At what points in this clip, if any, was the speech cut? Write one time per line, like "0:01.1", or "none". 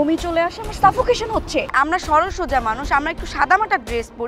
0:01.7